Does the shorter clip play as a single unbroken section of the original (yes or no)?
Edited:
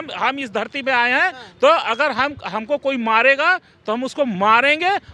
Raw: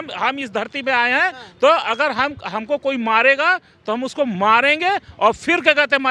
yes